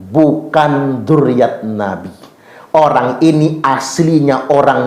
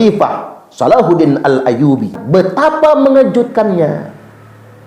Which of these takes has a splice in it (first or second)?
second